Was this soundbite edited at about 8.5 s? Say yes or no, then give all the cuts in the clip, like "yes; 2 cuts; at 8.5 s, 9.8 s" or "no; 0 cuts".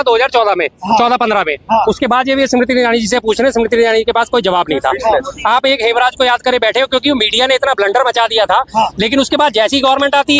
no; 0 cuts